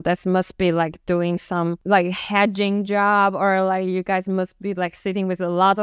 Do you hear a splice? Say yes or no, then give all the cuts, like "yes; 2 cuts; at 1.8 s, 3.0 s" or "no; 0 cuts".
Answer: yes; 1 cut; at 1.8 s